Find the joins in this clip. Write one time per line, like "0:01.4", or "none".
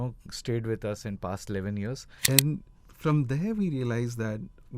0:02.1

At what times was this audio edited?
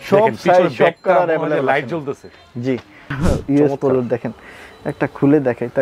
0:03.1

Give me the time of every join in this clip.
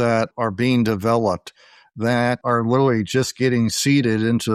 none

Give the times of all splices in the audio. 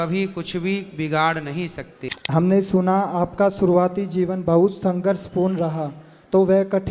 0:02.0

